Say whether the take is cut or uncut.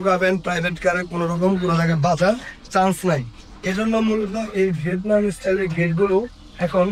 uncut